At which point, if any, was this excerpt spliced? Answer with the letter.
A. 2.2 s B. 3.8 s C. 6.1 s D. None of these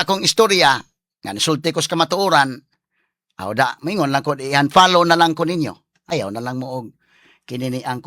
C